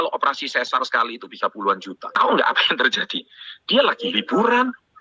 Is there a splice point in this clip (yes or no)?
yes